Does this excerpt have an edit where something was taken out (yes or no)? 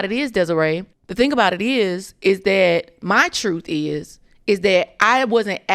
yes